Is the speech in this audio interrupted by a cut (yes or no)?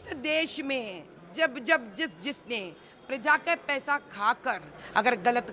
no